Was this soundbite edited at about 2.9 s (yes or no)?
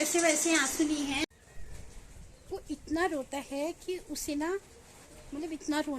no